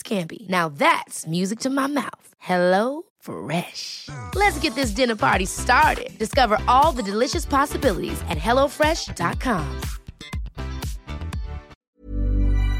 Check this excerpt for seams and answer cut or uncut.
cut